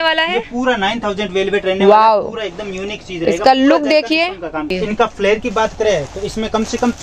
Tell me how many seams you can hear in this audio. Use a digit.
1